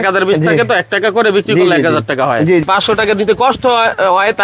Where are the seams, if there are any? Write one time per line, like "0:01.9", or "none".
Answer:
0:02.6